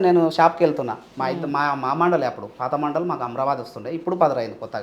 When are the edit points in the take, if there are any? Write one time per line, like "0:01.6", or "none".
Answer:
none